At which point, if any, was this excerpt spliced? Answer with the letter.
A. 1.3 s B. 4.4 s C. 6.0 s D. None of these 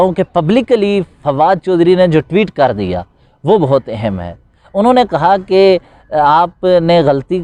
D